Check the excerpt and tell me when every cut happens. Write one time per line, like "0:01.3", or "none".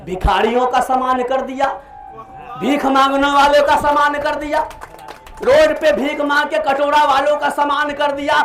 none